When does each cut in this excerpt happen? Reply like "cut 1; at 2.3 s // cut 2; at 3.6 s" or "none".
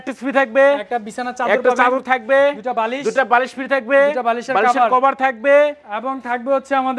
none